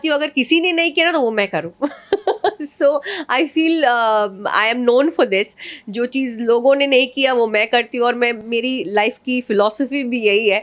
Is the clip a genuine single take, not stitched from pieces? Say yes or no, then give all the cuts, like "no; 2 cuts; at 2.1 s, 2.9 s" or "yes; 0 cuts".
yes; 0 cuts